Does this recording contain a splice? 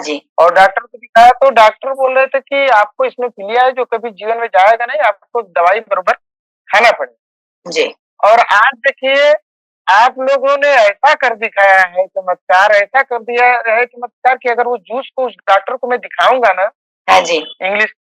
no; 0 cuts

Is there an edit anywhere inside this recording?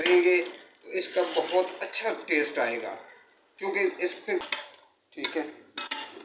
yes; 1 cut; at 4.4 s

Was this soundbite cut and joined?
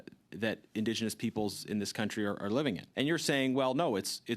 yes; 1 cut; at 2.9 s

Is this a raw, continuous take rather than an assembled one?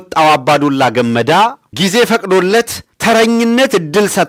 yes; 0 cuts

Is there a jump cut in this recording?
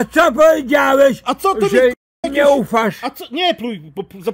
no; 0 cuts

